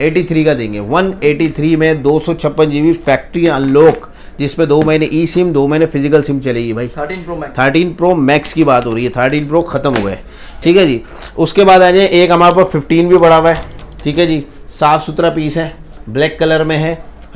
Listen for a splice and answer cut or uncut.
uncut